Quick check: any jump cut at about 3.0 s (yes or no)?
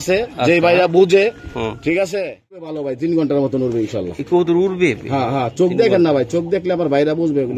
yes